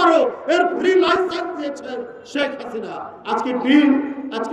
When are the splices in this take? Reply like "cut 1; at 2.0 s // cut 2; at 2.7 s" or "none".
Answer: cut 1; at 3.0 s